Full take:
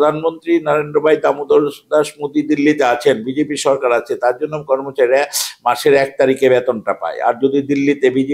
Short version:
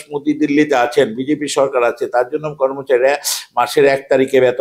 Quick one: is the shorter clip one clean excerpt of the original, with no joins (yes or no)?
yes